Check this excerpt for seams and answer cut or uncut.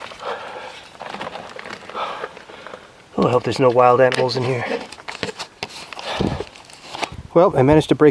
cut